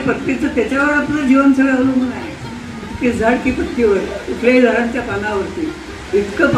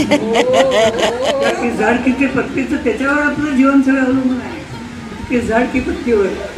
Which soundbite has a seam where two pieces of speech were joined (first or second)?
second